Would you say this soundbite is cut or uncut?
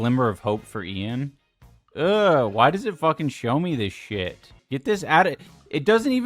cut